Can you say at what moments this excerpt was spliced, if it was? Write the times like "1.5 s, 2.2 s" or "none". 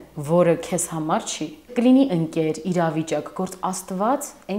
1.7 s